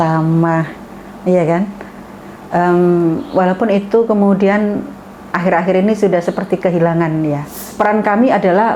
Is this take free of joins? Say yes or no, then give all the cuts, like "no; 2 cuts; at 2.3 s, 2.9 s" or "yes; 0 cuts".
no; 1 cut; at 7.7 s